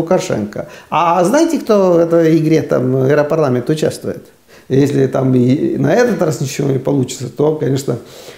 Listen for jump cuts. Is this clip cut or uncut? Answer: cut